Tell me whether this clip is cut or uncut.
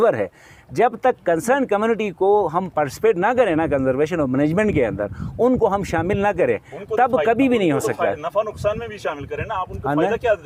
uncut